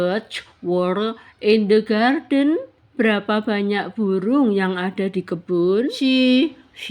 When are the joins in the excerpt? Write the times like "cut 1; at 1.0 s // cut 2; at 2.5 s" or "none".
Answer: cut 1; at 5.9 s

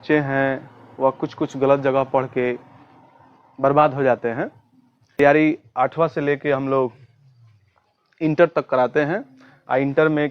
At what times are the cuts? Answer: cut 1; at 5.2 s

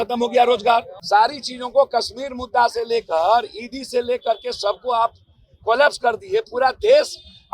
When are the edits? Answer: cut 1; at 1.0 s

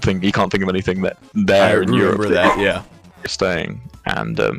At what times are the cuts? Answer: cut 1; at 3.3 s

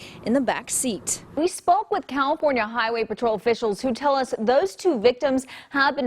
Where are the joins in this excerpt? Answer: cut 1; at 1.3 s

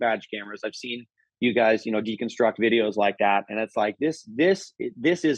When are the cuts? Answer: none

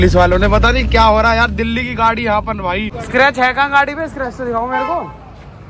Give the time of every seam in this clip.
cut 1; at 2.9 s

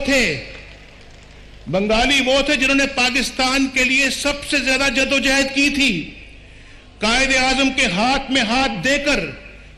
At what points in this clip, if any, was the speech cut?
none

